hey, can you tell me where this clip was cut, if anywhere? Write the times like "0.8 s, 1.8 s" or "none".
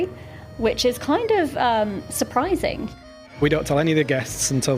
3.0 s